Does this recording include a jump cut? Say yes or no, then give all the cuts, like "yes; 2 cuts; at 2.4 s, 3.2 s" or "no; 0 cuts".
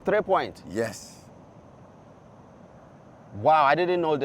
no; 0 cuts